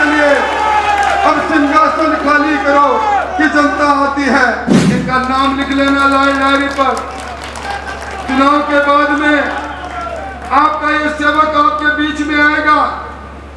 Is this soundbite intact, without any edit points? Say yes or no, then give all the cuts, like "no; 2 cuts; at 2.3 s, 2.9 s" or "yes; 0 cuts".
no; 1 cut; at 4.7 s